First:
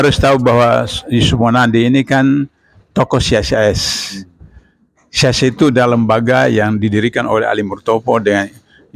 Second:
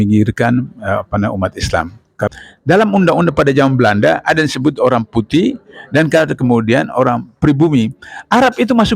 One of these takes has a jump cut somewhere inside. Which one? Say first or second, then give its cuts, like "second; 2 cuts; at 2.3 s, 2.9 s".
second; 1 cut; at 2.3 s